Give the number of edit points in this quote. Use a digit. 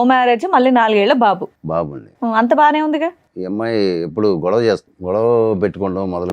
2